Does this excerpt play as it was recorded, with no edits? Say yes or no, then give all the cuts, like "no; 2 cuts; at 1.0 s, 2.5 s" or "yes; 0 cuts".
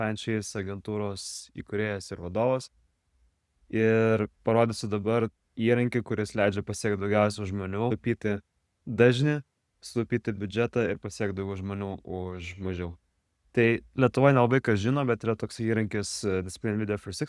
no; 1 cut; at 7.9 s